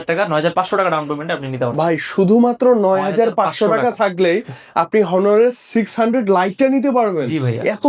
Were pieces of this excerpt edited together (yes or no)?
no